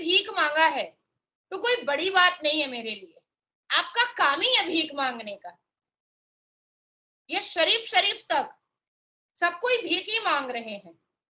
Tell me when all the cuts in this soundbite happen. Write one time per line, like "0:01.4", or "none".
none